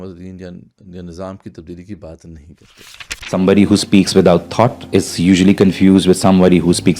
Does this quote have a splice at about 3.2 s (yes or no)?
yes